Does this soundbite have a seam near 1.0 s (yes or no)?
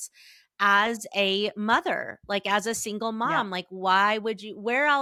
no